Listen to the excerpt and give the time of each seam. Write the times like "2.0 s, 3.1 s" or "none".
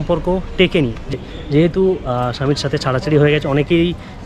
1.0 s